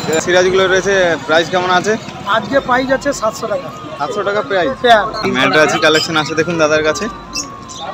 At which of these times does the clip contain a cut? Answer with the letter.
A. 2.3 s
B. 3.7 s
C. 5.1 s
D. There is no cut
C